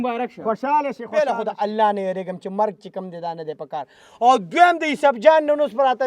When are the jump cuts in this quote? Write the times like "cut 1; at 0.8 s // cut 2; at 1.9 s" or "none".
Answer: cut 1; at 1.0 s